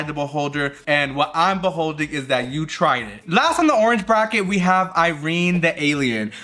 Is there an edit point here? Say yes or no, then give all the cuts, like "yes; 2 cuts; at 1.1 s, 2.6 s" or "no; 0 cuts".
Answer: no; 0 cuts